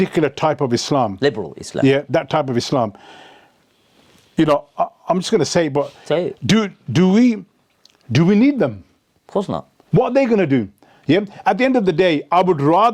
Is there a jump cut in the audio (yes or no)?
no